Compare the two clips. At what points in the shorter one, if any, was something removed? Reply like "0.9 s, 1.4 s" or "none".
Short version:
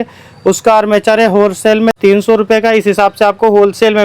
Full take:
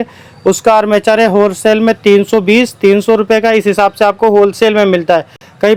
2.0 s